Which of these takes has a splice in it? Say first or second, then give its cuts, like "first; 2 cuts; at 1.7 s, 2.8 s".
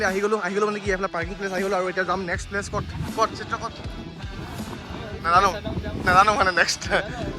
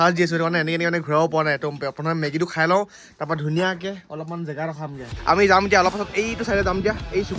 second; 1 cut; at 5.1 s